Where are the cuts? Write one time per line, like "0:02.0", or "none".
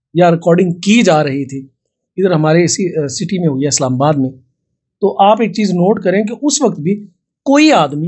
none